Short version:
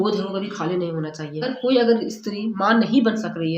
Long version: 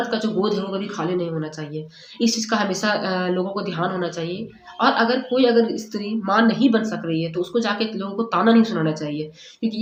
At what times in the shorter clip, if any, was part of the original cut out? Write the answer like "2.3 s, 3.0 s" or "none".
1.4 s